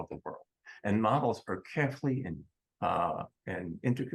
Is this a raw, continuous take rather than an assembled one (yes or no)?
yes